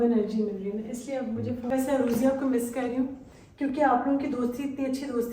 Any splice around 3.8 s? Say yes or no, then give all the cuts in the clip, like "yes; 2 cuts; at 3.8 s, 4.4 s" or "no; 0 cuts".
no; 1 cut; at 1.7 s